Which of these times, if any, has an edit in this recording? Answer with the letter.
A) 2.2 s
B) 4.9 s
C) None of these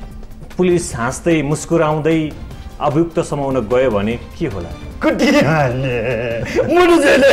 B